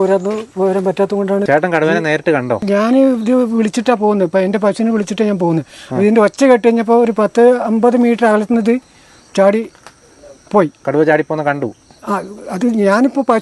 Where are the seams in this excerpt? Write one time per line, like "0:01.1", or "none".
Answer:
0:01.5
0:02.6